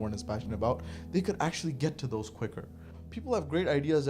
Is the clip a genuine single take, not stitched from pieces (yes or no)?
no